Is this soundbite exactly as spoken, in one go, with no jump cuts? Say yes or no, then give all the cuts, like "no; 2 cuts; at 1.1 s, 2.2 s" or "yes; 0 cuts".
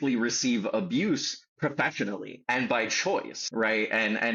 no; 2 cuts; at 2.3 s, 3.4 s